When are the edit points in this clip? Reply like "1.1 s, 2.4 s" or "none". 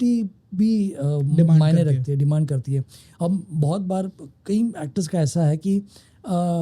none